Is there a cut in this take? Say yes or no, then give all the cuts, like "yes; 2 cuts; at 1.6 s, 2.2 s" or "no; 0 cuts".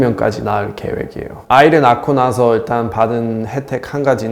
yes; 1 cut; at 1.4 s